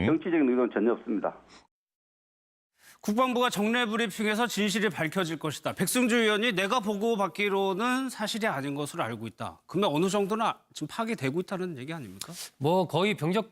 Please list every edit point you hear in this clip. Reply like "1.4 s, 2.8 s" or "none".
3.9 s